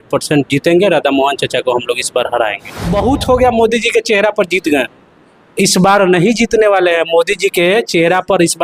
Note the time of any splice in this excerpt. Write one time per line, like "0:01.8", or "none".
0:02.8

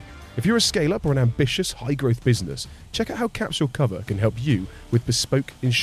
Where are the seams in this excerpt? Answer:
none

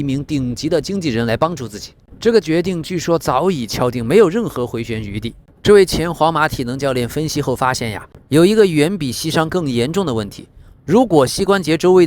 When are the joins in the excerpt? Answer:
0:05.4

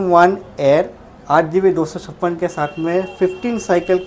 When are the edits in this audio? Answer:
none

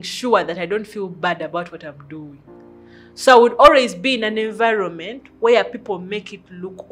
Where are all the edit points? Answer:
none

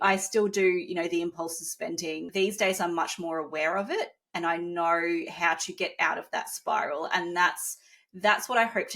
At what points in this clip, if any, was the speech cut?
0:02.2

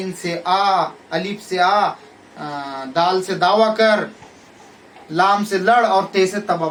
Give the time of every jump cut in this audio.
none

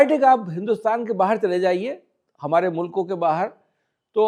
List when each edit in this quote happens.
none

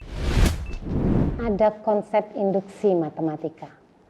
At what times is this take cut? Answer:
0:01.4

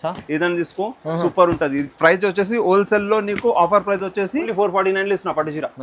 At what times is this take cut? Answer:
0:04.5

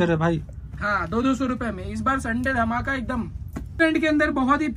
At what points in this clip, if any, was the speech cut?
0:03.8

